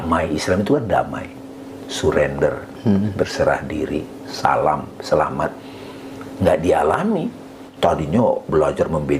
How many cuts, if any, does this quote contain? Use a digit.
1